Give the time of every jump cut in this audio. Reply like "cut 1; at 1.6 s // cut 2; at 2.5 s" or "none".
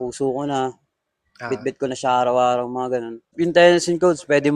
cut 1; at 3.2 s